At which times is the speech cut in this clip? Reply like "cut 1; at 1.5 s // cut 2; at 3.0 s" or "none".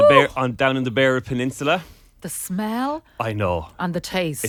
none